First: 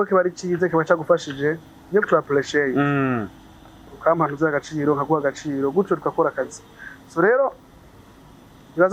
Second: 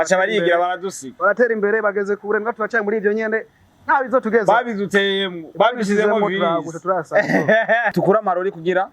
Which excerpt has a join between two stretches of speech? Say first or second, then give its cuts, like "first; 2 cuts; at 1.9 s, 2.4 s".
second; 1 cut; at 7.9 s